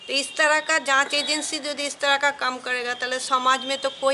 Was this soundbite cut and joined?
no; 0 cuts

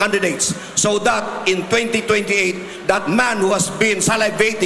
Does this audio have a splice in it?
no; 0 cuts

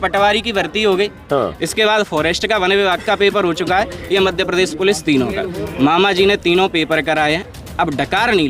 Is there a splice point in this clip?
no; 0 cuts

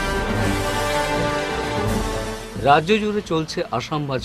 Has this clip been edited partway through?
no; 0 cuts

